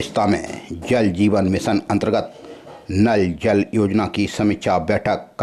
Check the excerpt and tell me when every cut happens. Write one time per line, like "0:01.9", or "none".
none